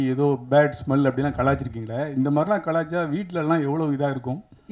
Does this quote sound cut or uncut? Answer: uncut